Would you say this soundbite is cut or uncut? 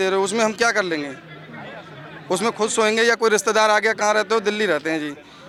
uncut